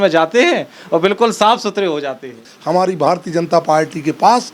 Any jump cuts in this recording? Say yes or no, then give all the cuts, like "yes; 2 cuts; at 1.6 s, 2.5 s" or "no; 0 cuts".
yes; 1 cut; at 2.4 s